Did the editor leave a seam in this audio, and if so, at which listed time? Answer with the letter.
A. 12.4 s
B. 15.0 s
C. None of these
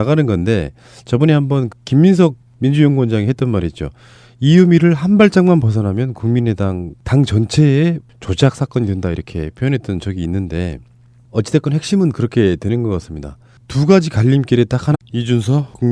C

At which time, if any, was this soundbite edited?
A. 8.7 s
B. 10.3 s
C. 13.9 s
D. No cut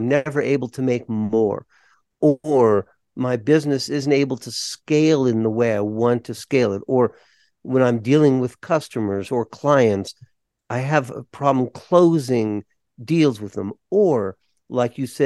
D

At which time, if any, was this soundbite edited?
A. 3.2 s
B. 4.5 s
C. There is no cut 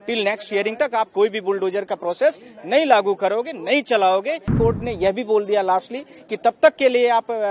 B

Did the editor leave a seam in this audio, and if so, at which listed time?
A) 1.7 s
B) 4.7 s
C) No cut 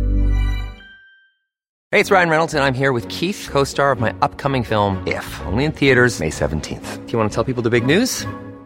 A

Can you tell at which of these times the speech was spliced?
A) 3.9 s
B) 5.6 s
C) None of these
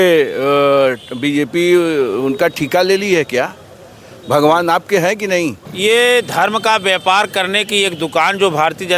B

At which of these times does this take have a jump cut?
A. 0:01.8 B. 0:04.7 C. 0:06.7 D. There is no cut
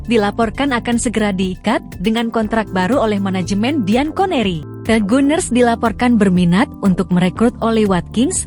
B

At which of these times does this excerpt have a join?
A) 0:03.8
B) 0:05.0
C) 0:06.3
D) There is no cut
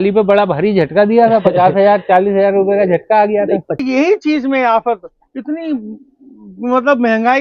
A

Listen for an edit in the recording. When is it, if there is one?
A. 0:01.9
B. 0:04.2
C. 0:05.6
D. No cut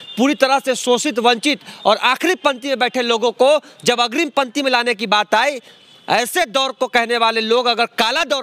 D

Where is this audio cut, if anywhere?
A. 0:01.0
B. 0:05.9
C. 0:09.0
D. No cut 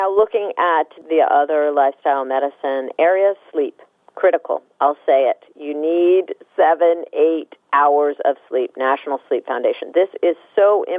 A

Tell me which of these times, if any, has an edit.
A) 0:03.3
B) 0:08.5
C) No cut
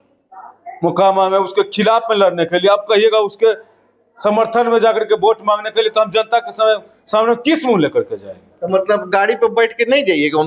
C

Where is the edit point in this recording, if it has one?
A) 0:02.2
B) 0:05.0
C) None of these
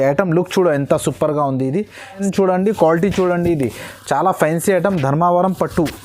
A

